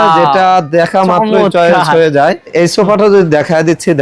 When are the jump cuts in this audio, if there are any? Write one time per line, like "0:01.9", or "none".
0:02.5